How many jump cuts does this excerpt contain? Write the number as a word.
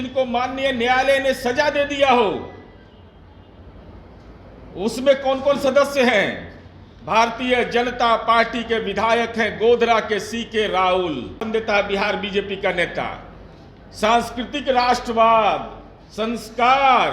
one